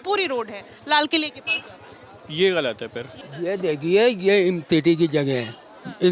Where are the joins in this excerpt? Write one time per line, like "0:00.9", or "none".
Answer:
0:03.2